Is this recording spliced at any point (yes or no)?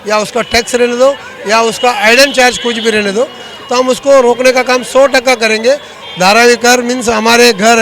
yes